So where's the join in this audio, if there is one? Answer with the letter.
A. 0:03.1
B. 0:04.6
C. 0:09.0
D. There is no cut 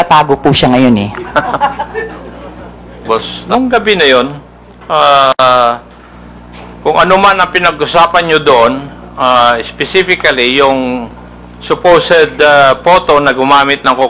A